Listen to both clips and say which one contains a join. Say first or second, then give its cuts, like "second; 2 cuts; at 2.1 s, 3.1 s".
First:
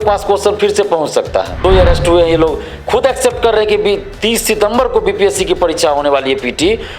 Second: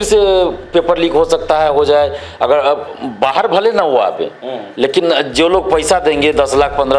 first; 1 cut; at 1.6 s